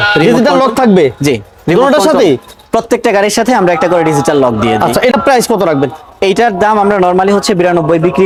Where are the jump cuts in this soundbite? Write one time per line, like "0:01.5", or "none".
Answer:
none